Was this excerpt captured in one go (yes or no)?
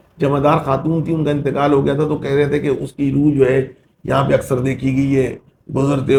yes